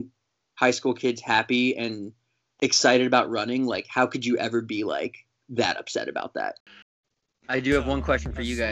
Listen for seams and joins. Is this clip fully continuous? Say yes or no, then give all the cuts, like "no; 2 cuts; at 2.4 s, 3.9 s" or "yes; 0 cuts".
no; 1 cut; at 6.5 s